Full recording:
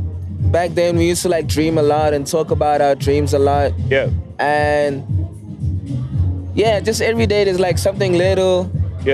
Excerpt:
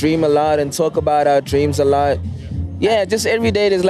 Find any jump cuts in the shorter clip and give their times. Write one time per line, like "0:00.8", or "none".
0:02.3